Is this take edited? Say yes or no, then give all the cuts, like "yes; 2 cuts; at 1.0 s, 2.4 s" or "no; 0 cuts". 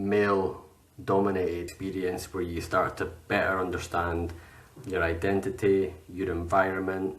yes; 1 cut; at 1.8 s